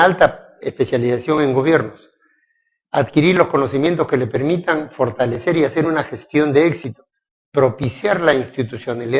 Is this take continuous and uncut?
yes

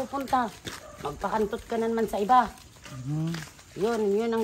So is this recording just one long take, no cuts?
yes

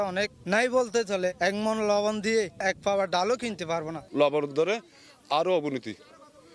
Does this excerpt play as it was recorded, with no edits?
yes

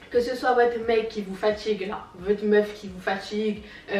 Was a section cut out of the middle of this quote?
no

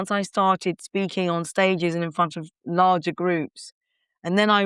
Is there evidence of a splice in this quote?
no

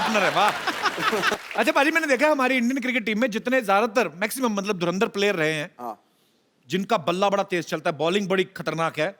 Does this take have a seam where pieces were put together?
yes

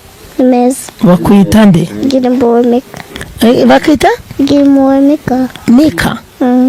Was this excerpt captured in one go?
yes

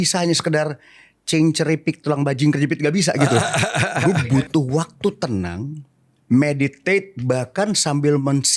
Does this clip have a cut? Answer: yes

